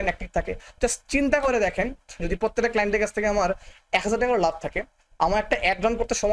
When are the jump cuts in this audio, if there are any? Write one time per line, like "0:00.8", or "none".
none